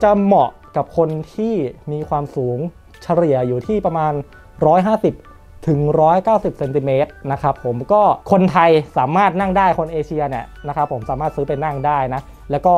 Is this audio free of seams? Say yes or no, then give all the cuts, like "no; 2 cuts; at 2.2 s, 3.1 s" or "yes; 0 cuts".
yes; 0 cuts